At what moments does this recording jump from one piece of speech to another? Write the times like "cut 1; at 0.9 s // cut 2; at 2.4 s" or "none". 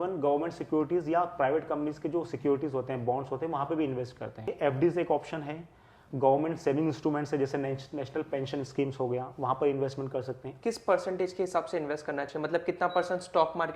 cut 1; at 4.5 s // cut 2; at 10.5 s